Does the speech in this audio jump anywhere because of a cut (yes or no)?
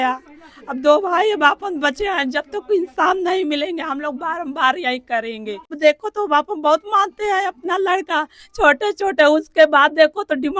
yes